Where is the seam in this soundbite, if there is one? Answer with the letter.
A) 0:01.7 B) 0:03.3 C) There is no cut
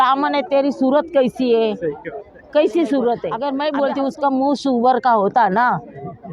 B